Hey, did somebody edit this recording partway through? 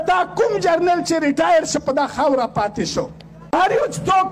yes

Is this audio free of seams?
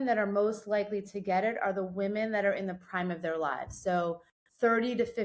yes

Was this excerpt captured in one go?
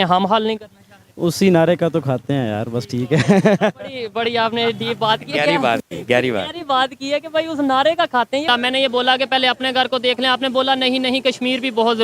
no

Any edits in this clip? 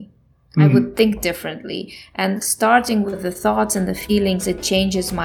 no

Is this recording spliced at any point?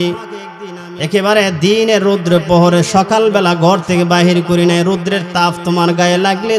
no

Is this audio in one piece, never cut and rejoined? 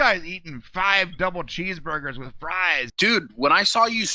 no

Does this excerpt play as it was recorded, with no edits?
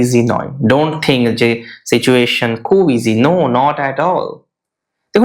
yes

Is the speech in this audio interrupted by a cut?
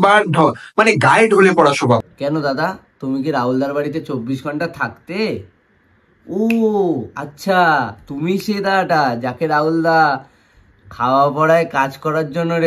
yes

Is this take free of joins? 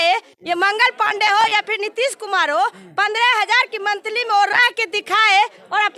yes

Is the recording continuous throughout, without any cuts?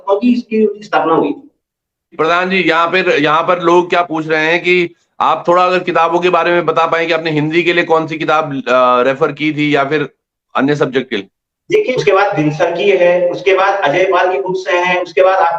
no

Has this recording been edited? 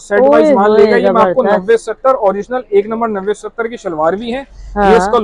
no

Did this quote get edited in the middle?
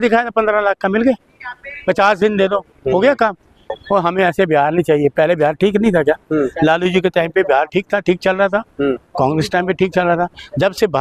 yes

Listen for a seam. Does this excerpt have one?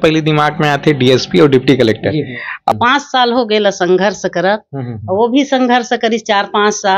yes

